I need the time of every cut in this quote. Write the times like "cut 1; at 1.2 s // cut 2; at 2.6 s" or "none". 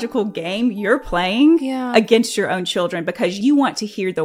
cut 1; at 3.4 s